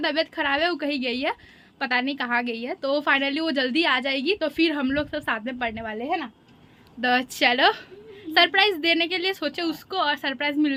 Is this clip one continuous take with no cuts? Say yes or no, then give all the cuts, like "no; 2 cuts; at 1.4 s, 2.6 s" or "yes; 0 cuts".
yes; 0 cuts